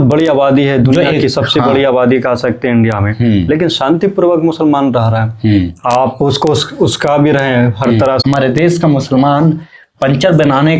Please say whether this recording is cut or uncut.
cut